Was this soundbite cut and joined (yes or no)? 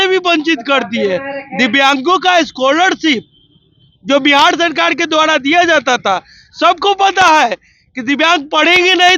no